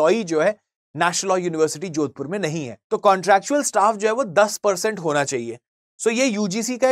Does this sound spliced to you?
yes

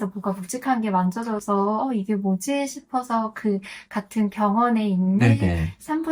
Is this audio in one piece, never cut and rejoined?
yes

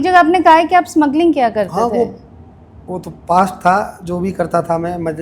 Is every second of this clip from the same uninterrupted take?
yes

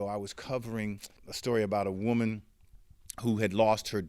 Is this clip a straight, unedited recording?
no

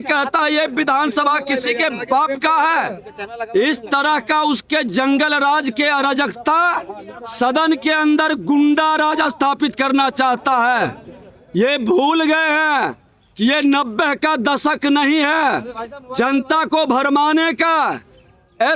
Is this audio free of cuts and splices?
yes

